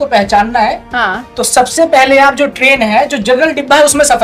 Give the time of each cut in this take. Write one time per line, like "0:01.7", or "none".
none